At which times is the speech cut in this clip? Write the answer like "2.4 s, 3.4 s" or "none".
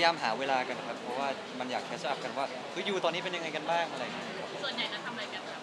none